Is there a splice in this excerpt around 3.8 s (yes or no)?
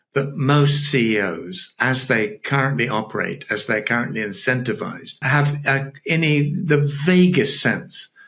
no